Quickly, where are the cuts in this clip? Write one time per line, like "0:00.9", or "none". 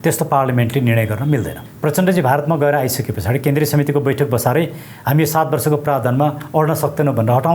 0:01.6